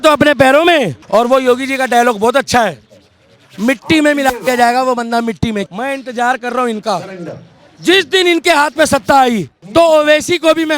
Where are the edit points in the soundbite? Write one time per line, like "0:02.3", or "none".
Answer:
0:01.0
0:05.6
0:09.5